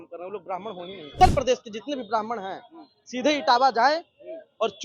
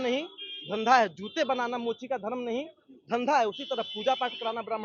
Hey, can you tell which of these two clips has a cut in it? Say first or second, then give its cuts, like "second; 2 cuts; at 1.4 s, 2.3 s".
first; 1 cut; at 1.1 s